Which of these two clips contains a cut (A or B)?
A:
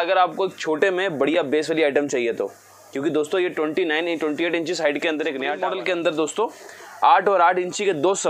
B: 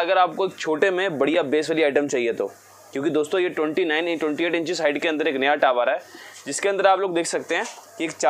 A